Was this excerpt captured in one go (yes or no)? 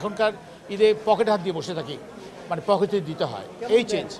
yes